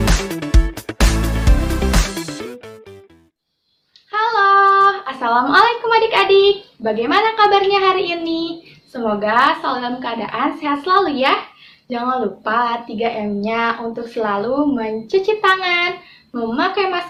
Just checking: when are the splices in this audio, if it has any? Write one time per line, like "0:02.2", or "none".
none